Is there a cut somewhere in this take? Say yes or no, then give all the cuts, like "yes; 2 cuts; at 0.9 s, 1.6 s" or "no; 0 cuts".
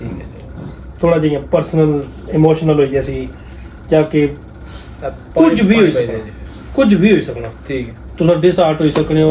no; 0 cuts